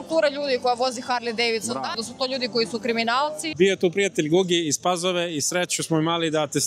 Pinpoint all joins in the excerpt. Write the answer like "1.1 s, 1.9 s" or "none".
2.0 s, 3.4 s

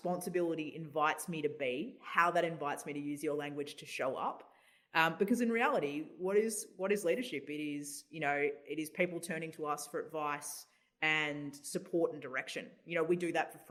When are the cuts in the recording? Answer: none

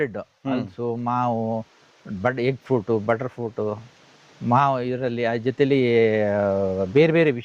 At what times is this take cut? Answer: none

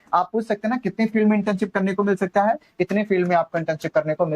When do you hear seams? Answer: none

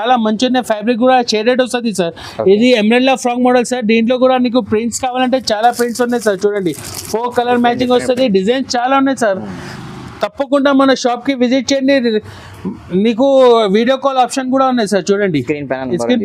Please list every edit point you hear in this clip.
none

